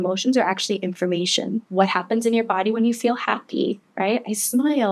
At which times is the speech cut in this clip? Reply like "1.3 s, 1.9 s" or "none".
1.6 s, 3.9 s